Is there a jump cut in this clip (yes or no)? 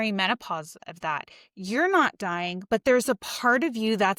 no